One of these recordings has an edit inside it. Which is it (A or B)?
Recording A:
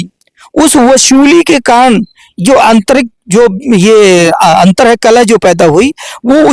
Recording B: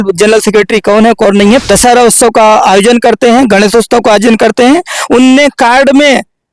B